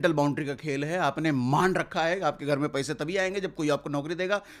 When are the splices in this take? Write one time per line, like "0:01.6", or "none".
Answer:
none